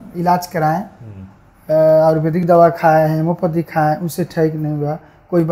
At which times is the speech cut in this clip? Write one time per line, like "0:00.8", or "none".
none